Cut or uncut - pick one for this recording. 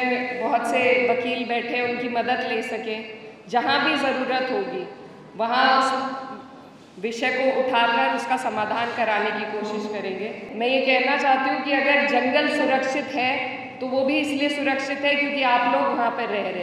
cut